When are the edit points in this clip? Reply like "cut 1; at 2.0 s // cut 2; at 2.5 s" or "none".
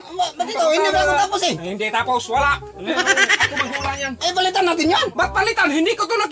none